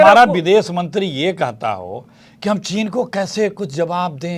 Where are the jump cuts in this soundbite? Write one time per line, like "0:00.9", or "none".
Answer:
none